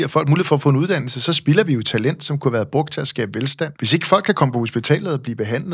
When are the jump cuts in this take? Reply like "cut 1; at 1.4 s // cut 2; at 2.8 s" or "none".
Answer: cut 1; at 3.8 s